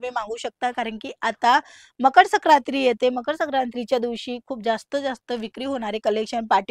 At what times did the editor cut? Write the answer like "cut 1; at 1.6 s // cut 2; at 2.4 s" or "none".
none